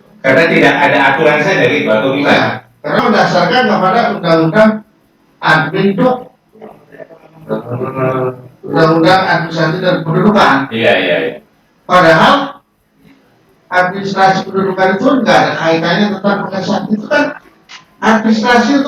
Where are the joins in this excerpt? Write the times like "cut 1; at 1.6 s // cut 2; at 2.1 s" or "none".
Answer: cut 1; at 3.0 s